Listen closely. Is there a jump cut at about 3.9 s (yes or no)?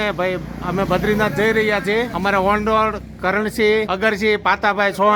yes